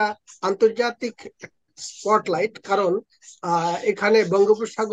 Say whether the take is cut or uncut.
uncut